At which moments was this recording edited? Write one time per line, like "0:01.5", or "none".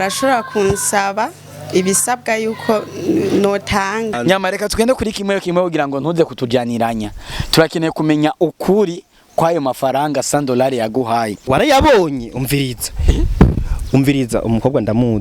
0:04.2
0:11.4